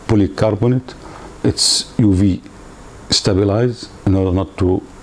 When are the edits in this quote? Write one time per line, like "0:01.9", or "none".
none